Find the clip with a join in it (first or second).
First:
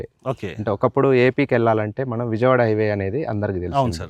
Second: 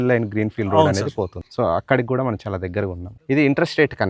second